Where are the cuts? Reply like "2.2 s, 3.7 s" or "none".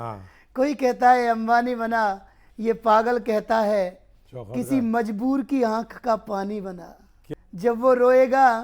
7.1 s